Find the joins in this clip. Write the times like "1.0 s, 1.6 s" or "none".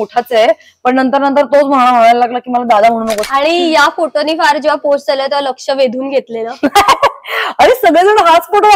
3.3 s